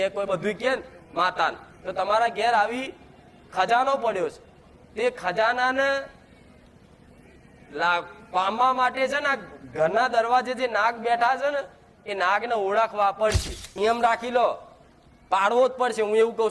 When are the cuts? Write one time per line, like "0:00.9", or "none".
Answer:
0:13.7

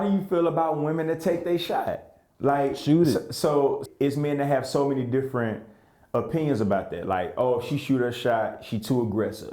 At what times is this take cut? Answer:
0:03.8

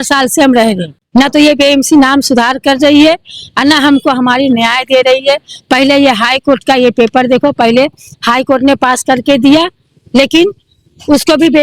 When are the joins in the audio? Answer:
0:00.9

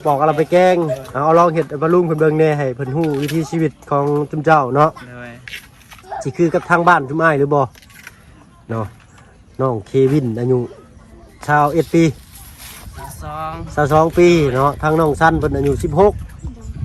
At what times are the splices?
none

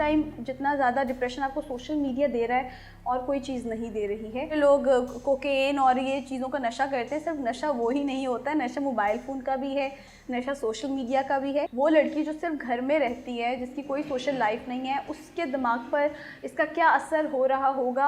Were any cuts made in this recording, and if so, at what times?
0:04.5
0:11.7

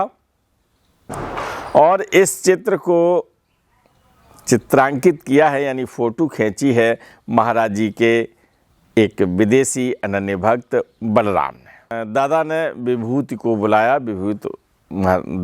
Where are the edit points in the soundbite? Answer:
0:12.0

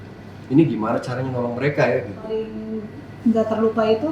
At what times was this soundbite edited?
0:02.6

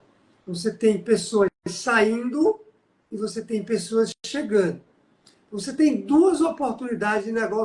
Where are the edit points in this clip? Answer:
none

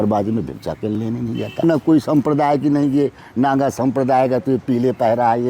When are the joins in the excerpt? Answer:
0:01.6

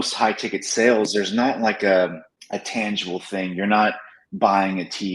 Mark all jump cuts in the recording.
0:02.3

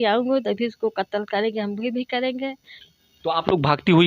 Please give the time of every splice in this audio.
0:02.7

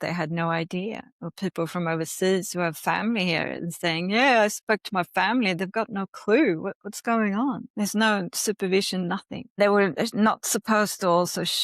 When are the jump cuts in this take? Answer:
0:07.7
0:09.6

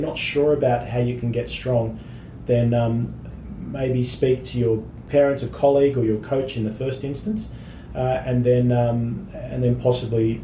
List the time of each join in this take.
0:05.0

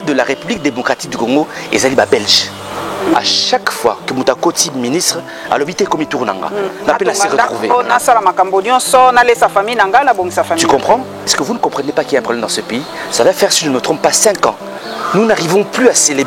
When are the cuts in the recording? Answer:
0:02.7
0:11.3

